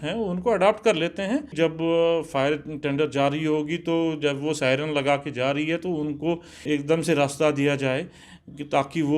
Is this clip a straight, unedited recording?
no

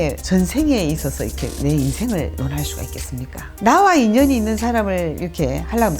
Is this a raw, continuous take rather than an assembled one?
no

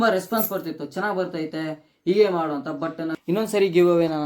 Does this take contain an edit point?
yes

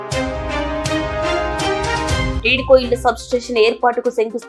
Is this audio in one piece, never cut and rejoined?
no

